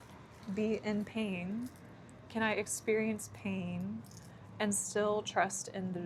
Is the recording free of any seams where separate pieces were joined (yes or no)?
yes